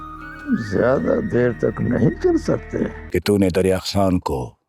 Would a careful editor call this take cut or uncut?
cut